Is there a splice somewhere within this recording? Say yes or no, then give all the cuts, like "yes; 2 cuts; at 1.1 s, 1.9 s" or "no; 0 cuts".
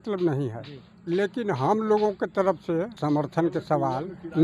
yes; 1 cut; at 2.9 s